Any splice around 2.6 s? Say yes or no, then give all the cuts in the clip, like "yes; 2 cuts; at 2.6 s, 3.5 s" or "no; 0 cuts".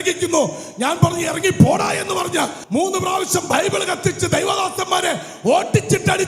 yes; 1 cut; at 2.6 s